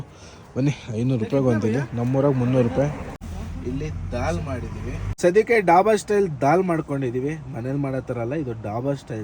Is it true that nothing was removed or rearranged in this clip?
no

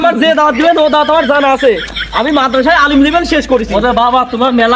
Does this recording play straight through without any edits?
yes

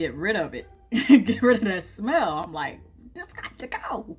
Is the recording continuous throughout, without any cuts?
yes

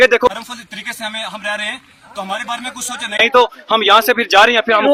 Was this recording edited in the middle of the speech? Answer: no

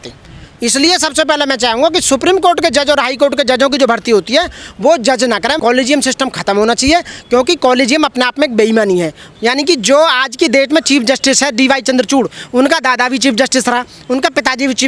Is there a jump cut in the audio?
no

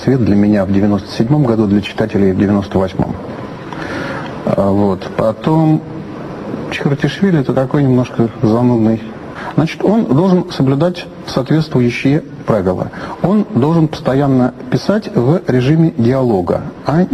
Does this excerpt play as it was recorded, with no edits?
yes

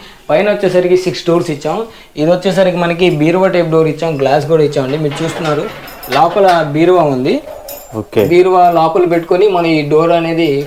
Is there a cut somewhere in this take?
no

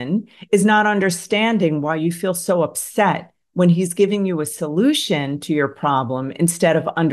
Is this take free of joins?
yes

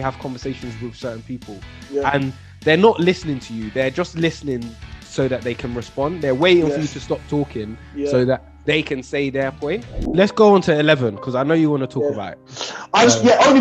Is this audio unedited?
no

